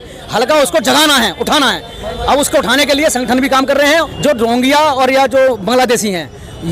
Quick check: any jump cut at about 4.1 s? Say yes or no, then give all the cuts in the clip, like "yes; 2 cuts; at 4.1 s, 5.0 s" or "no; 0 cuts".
yes; 1 cut; at 4.1 s